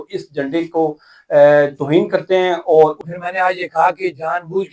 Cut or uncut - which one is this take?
cut